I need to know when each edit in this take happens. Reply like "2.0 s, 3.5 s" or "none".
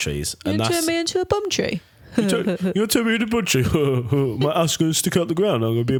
none